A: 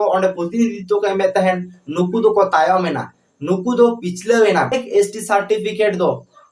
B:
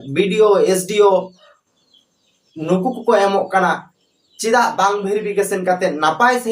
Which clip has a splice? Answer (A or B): A